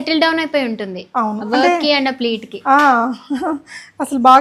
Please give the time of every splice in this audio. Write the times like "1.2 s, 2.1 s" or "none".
none